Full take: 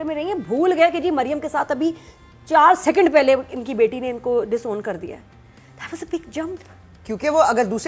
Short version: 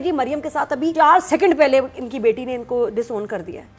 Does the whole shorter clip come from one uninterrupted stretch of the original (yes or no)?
no